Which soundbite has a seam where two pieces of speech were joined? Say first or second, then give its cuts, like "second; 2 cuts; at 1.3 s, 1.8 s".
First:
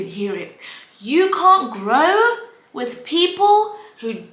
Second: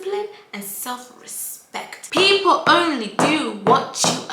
second; 1 cut; at 2.0 s